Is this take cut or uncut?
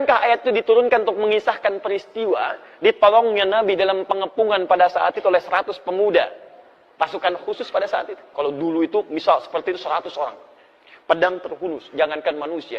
cut